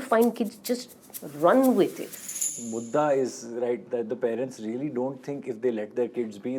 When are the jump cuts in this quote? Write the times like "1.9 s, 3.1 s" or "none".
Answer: 2.4 s